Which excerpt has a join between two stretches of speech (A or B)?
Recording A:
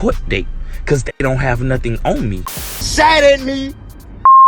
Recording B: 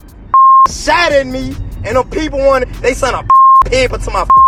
A